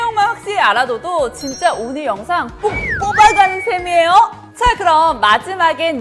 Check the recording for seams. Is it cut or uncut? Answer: uncut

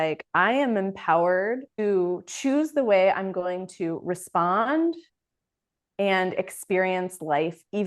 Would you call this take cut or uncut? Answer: cut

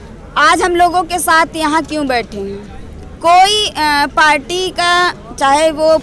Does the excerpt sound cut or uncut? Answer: uncut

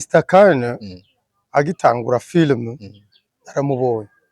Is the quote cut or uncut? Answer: uncut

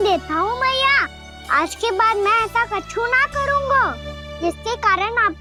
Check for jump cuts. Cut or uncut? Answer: uncut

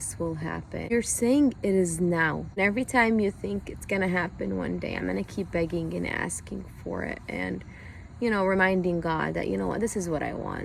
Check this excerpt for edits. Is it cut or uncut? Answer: cut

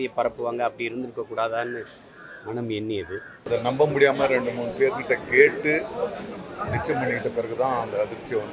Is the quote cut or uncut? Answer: cut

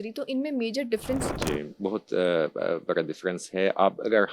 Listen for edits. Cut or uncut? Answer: cut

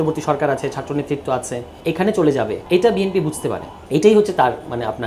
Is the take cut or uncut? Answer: cut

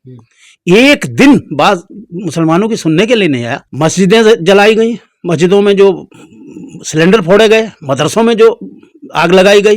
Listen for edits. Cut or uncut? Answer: cut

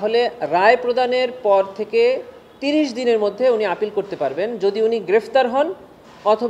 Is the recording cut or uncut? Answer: uncut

